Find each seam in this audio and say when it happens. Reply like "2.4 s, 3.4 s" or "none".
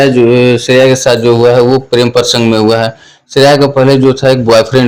none